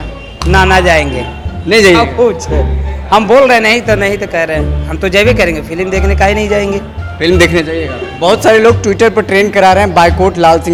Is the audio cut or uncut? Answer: uncut